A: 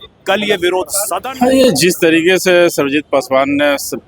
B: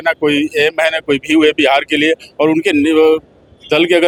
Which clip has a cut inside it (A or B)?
A